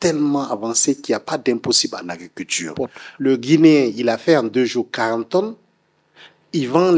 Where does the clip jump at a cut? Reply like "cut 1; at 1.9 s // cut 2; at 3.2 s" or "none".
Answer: cut 1; at 2.7 s